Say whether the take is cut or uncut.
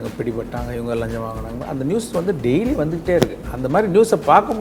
uncut